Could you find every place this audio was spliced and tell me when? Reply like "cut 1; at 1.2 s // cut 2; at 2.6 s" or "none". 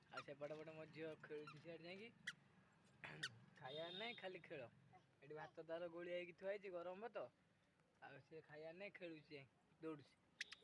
none